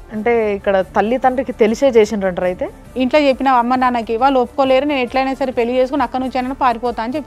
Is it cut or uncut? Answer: cut